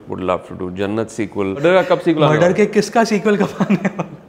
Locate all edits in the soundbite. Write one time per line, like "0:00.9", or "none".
0:01.6